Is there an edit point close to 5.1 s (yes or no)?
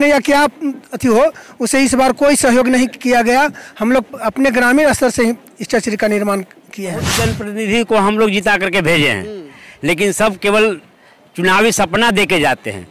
no